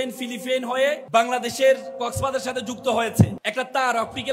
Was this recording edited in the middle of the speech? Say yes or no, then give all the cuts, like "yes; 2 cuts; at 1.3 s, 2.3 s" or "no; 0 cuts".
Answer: yes; 2 cuts; at 1.0 s, 3.4 s